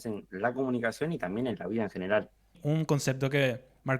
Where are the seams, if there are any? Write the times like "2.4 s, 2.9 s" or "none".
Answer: 2.6 s